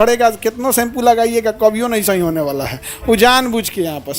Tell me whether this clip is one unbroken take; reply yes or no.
yes